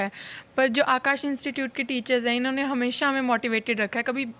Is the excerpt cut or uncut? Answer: uncut